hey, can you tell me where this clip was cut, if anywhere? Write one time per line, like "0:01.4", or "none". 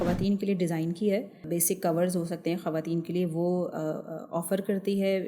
0:01.4

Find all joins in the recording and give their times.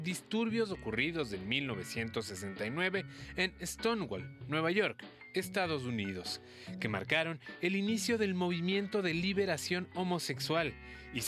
none

